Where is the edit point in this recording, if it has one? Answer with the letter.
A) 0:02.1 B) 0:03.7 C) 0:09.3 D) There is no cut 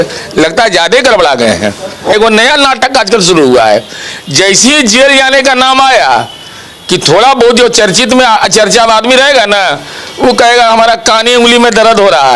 A